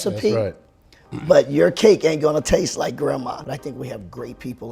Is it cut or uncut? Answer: cut